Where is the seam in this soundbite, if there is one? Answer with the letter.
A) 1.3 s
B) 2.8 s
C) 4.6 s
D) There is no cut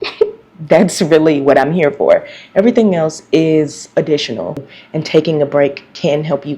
C